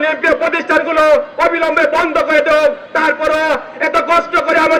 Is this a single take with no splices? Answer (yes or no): yes